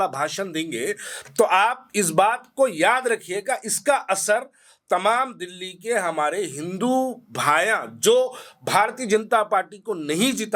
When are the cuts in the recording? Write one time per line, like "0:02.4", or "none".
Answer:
none

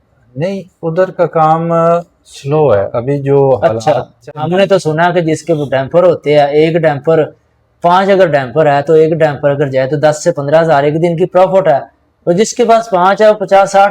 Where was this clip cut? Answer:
0:04.3

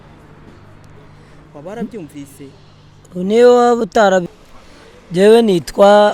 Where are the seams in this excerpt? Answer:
0:04.3

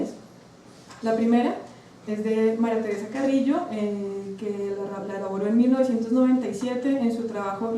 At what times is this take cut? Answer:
0:05.5

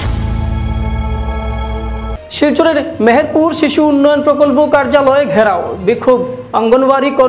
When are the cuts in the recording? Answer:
0:02.1

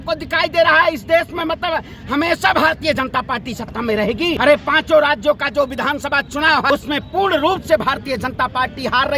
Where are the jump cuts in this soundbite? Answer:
0:04.4
0:06.7

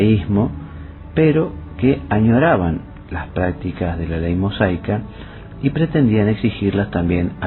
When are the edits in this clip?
none

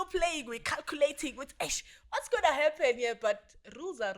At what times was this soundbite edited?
none

